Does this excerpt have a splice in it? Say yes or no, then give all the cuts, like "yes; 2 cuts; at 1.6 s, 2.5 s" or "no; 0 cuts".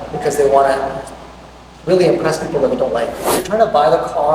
yes; 1 cut; at 3.4 s